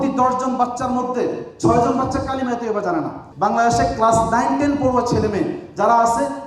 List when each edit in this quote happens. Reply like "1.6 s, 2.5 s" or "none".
3.2 s